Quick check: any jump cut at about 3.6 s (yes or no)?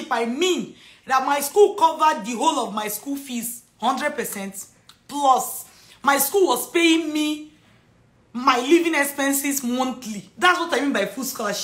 no